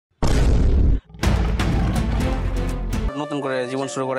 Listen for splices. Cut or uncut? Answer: cut